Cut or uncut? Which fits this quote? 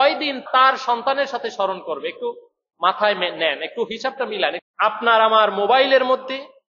cut